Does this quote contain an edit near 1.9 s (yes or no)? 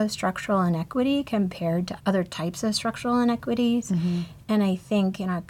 yes